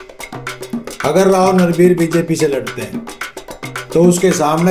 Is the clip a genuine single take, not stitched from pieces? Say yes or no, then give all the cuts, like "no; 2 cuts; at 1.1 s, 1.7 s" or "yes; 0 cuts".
yes; 0 cuts